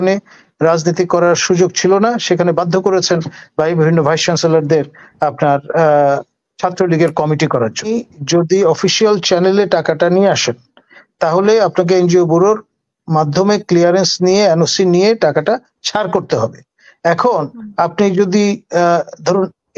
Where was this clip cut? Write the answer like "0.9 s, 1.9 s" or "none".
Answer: 7.9 s